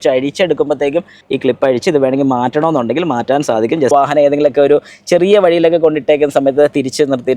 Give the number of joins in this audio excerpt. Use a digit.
2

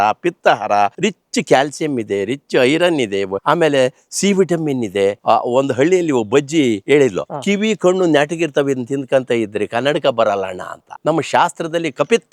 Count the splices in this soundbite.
5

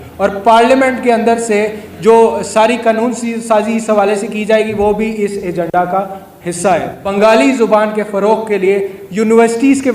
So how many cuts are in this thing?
1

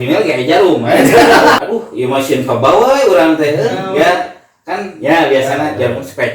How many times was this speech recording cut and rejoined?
1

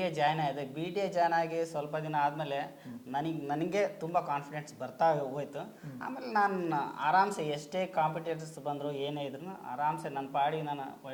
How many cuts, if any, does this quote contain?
0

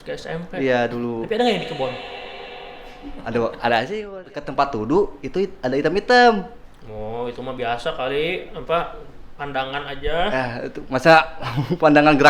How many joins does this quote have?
1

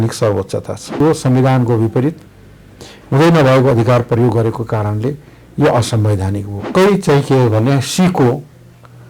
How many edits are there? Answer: 2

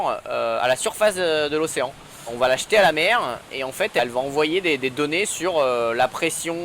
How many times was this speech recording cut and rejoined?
2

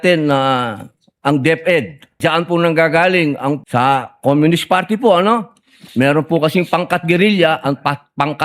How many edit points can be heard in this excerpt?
2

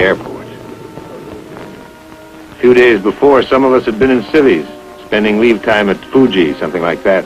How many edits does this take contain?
1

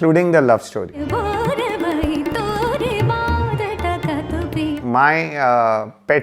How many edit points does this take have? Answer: 2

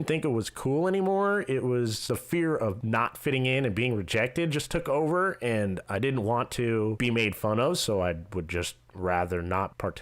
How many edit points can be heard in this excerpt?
3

